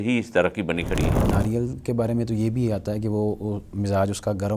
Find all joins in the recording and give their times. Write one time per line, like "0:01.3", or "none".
0:01.2